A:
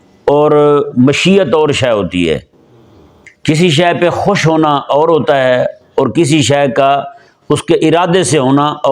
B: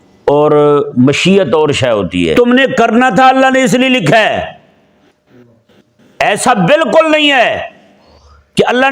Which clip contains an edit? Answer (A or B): B